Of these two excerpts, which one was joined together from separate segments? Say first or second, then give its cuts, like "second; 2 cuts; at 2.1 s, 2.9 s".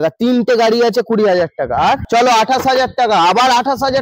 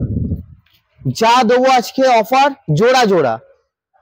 first; 1 cut; at 2.0 s